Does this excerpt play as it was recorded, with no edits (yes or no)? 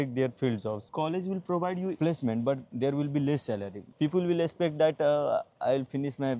yes